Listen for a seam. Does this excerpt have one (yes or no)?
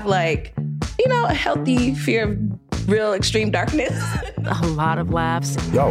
no